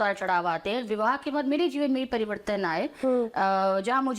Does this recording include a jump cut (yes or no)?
no